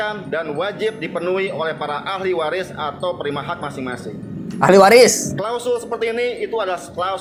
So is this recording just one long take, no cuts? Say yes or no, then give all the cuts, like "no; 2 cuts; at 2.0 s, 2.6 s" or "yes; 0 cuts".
yes; 0 cuts